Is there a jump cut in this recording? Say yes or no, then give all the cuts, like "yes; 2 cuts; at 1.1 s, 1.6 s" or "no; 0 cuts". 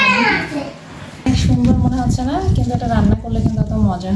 yes; 1 cut; at 1.3 s